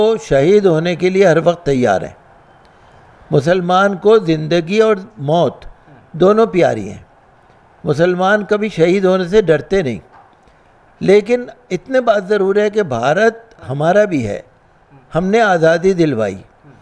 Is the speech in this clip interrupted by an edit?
no; 0 cuts

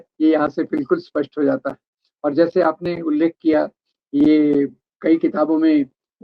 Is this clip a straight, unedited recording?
yes; 0 cuts

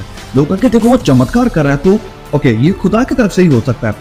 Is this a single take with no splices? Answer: yes; 0 cuts

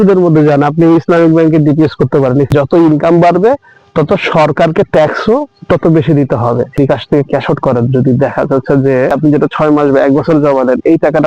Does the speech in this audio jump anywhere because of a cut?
yes; 3 cuts; at 2.5 s, 6.7 s, 9.1 s

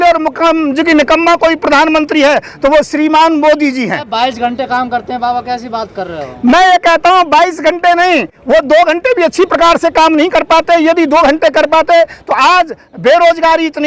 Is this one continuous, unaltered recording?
yes; 0 cuts

